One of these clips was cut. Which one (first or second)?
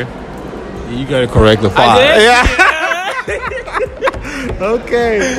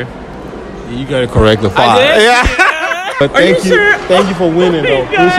second